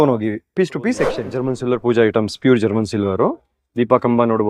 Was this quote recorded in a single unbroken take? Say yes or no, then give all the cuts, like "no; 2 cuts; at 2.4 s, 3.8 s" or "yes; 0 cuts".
no; 1 cut; at 1.3 s